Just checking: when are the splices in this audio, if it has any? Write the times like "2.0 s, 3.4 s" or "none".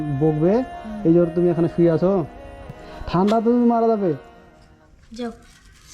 2.6 s